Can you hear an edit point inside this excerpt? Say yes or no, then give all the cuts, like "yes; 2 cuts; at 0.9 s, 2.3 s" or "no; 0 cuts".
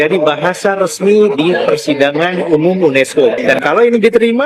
yes; 1 cut; at 3.4 s